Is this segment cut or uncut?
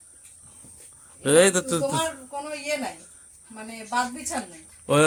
uncut